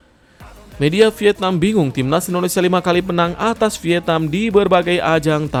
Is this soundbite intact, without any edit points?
yes; 0 cuts

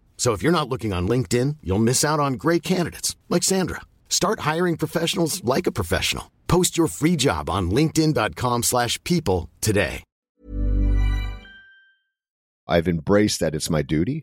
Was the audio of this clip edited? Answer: yes; 1 cut; at 12.7 s

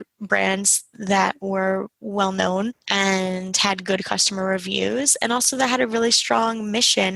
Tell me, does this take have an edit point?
yes; 1 cut; at 2.8 s

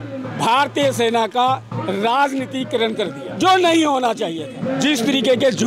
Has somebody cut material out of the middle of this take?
yes; 2 cuts; at 3.3 s, 4.5 s

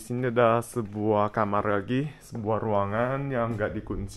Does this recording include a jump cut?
no; 0 cuts

